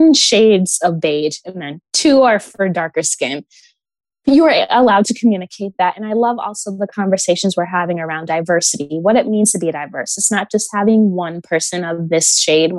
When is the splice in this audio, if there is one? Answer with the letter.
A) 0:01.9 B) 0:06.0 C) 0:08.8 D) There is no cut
B